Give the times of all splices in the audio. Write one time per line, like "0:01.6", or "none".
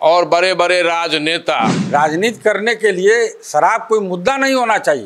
0:01.8